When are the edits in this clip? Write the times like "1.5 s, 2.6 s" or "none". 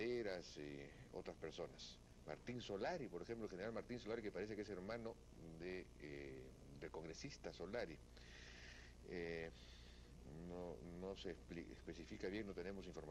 none